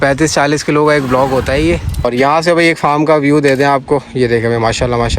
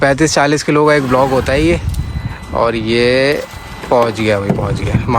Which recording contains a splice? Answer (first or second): first